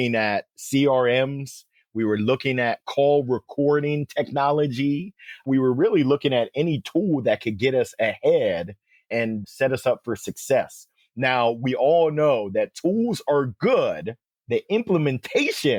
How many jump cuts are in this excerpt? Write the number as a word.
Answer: zero